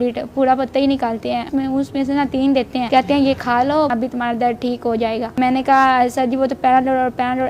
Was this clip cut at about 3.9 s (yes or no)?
yes